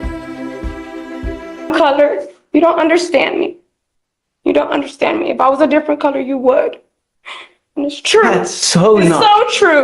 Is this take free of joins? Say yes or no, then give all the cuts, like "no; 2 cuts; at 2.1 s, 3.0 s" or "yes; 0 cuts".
no; 1 cut; at 1.7 s